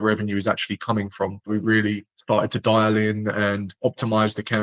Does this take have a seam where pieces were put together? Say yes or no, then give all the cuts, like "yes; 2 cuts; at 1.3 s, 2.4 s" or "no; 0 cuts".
yes; 1 cut; at 1.5 s